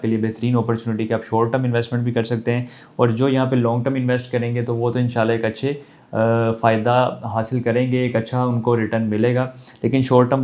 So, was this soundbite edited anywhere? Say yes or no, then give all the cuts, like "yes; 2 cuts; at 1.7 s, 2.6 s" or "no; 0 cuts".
no; 0 cuts